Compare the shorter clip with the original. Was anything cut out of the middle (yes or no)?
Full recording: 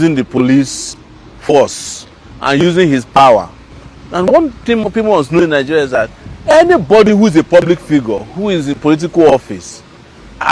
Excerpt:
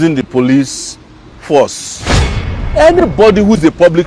yes